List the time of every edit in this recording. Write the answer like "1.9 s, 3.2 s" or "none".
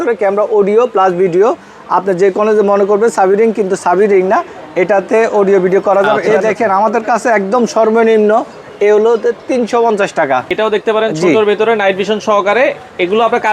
6.2 s, 10.5 s